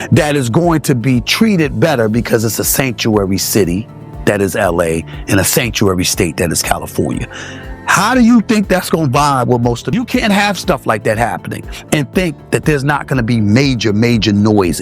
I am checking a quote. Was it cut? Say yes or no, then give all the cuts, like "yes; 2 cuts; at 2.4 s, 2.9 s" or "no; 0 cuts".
yes; 1 cut; at 9.8 s